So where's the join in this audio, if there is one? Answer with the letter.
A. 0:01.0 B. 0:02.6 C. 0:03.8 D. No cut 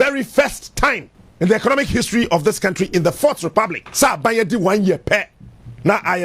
C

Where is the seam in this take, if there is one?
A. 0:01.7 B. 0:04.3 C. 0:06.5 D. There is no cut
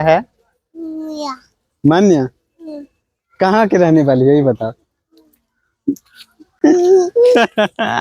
D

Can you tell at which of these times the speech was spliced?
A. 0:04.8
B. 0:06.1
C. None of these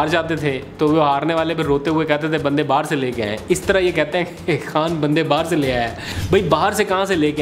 B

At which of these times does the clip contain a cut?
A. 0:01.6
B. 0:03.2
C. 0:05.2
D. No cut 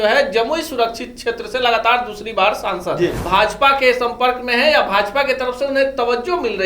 B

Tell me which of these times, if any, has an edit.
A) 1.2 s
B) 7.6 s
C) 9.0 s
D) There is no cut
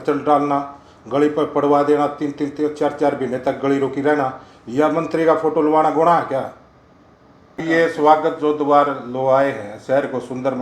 B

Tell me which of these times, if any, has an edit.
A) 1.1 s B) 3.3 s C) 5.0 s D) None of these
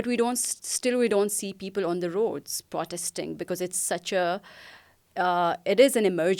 D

